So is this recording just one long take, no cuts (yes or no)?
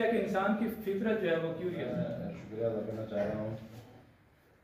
no